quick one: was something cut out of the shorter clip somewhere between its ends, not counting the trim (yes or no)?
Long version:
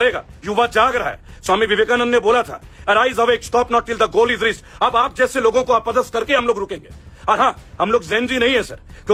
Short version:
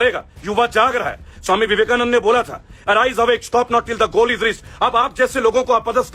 no